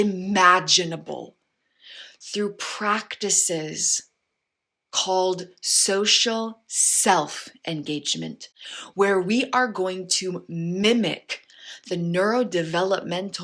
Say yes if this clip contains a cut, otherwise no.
no